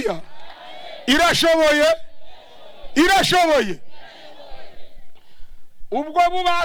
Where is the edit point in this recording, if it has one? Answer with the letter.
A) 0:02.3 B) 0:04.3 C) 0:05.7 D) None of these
D